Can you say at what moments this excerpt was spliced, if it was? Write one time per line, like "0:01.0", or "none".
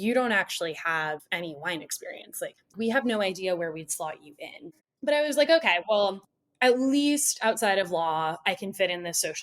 0:01.2
0:02.7
0:04.8